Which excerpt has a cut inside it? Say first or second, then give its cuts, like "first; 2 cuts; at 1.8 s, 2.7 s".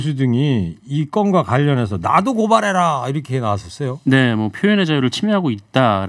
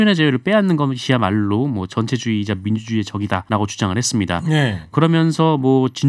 second; 2 cuts; at 3.4 s, 4.9 s